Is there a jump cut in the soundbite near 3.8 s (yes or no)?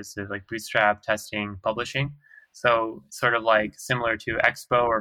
no